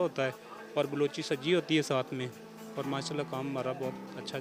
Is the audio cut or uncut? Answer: uncut